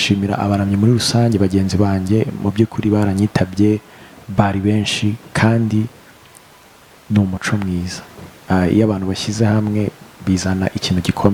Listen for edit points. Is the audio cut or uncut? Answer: uncut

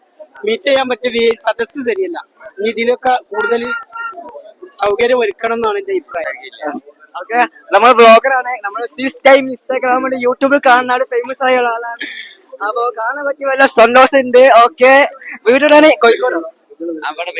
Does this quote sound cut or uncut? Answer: cut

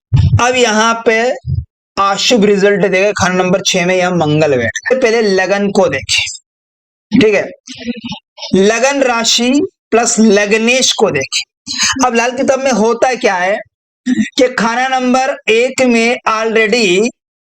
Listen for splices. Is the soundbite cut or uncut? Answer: cut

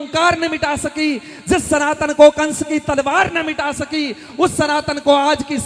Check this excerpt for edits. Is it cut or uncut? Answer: uncut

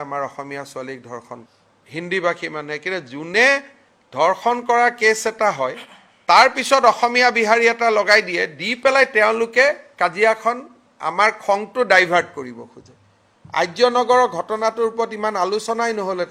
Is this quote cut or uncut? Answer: cut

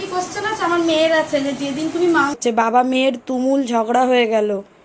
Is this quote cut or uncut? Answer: cut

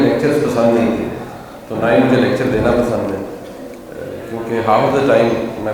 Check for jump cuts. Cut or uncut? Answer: uncut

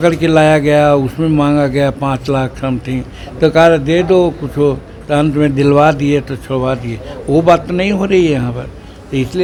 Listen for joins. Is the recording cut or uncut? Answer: uncut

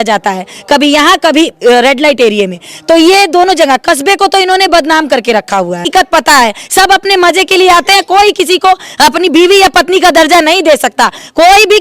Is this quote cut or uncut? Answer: cut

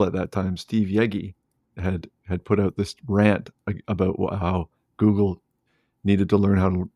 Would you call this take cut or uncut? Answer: cut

